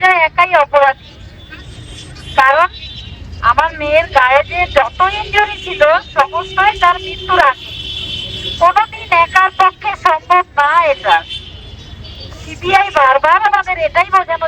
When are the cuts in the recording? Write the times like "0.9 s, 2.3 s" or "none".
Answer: none